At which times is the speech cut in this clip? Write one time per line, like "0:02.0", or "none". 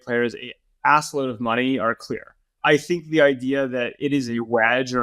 0:02.5